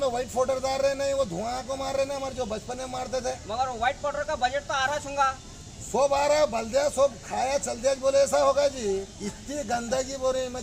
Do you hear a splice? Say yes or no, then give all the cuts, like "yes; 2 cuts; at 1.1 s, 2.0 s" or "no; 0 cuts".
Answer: no; 0 cuts